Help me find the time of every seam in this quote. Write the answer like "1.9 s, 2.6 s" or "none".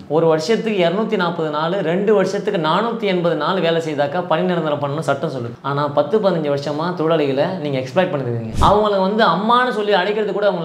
5.5 s, 8.4 s